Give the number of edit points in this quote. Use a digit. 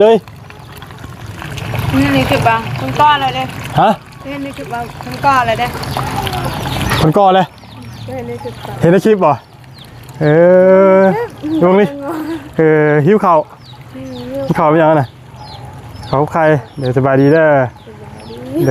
0